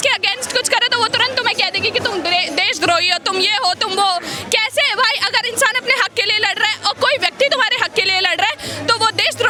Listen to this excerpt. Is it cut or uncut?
uncut